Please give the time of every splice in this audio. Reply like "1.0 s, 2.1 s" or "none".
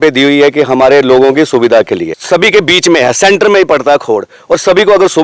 2.1 s